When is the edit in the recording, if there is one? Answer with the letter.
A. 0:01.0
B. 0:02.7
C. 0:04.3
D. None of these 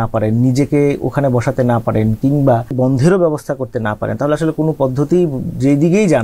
B